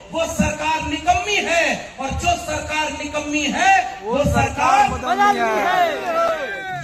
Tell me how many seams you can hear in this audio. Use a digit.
0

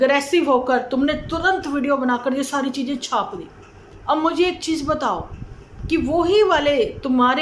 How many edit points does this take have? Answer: 0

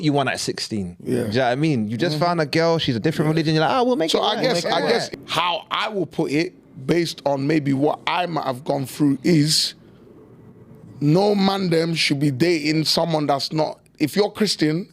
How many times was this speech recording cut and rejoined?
1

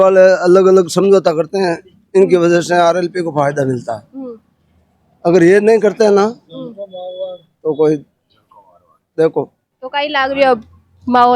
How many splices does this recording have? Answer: 0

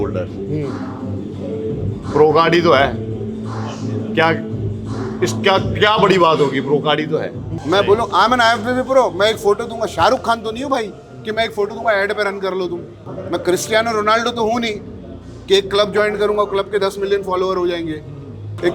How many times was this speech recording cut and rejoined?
1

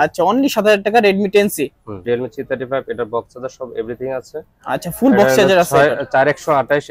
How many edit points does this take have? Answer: 1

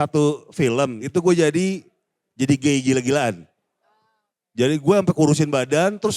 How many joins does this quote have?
1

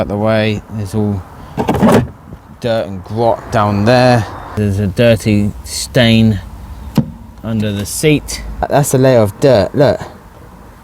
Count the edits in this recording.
2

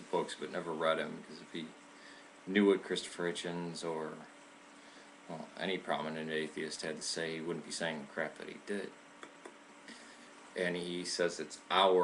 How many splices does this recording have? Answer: 1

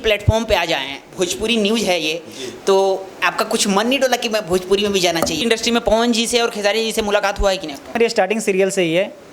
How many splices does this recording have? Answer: 2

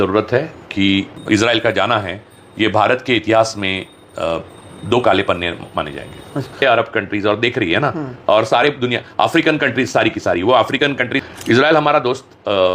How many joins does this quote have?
3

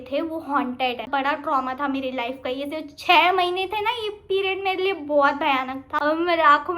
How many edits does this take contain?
2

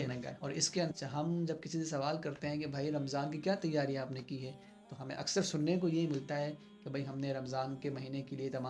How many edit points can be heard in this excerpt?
1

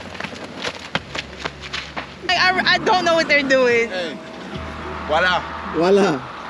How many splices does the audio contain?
1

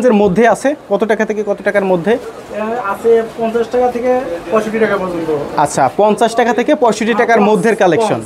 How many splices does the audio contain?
0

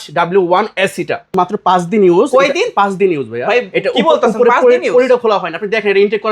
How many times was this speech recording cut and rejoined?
1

